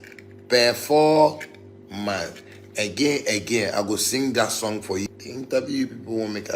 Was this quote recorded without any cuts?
no; 1 cut; at 5.1 s

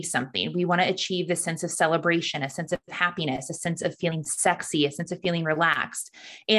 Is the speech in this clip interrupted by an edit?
no; 0 cuts

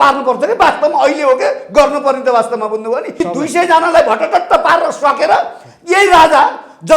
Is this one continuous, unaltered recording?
no; 1 cut; at 3.1 s

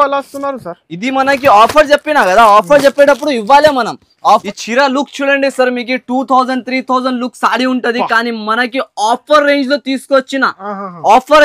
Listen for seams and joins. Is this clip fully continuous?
no; 1 cut; at 4.4 s

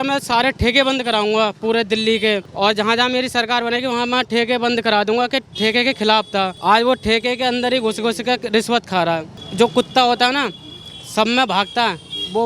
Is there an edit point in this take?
yes; 3 cuts; at 2.5 s, 6.5 s, 9.4 s

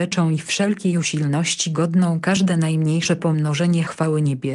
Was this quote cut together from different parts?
no; 0 cuts

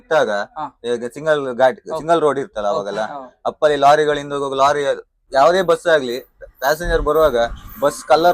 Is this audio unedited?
no; 1 cut; at 5.1 s

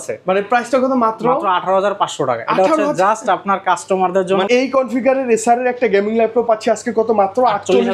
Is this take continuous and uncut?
no; 1 cut; at 4.5 s

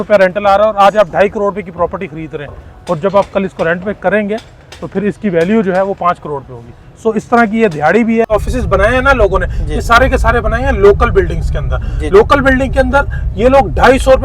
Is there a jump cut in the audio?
yes; 1 cut; at 8.3 s

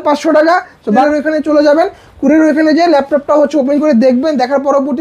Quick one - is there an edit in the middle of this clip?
yes; 1 cut; at 1.0 s

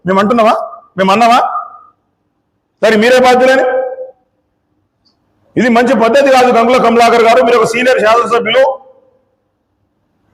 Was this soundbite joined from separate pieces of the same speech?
no; 0 cuts

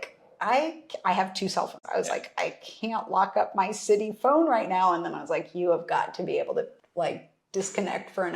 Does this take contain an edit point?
yes; 2 cuts; at 1.8 s, 6.8 s

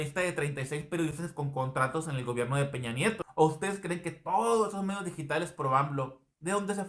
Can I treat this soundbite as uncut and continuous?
no; 1 cut; at 3.2 s

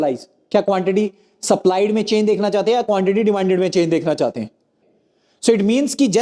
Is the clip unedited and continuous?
no; 1 cut; at 4.9 s

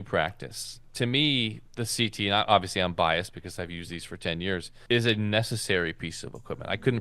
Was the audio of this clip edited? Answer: yes; 2 cuts; at 1.7 s, 4.7 s

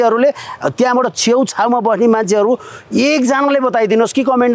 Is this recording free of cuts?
yes; 0 cuts

